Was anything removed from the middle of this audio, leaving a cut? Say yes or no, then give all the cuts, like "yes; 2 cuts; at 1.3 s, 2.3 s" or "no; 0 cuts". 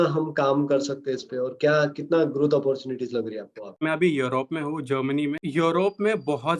yes; 2 cuts; at 3.8 s, 5.4 s